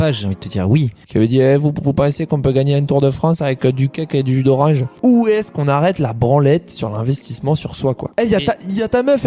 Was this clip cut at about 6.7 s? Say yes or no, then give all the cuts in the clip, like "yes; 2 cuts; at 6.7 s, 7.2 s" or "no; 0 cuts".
no; 3 cuts; at 1.0 s, 5.0 s, 8.1 s